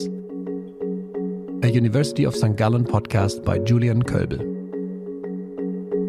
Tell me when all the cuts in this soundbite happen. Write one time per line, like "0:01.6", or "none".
none